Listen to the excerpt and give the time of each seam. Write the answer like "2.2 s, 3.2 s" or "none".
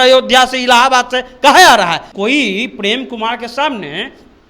2.1 s